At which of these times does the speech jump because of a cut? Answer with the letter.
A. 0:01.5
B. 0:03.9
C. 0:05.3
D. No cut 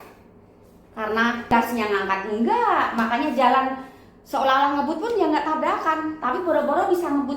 A